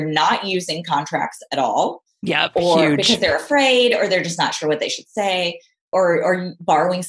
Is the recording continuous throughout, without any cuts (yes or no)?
yes